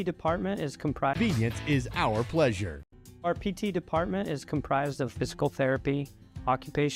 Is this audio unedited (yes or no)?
yes